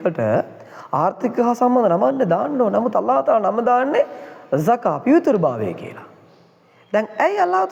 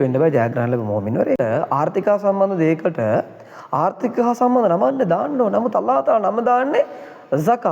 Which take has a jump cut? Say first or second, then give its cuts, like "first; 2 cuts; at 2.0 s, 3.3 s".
second; 1 cut; at 1.4 s